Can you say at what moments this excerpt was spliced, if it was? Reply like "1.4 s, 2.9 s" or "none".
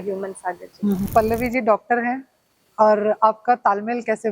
1.1 s